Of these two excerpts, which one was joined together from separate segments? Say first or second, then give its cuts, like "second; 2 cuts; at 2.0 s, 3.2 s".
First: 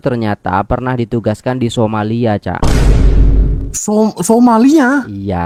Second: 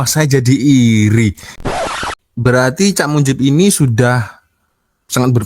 second; 1 cut; at 1.8 s